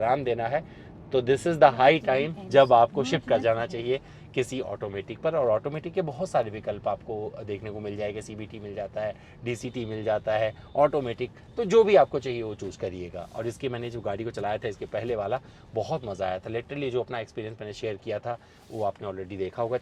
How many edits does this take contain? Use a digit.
0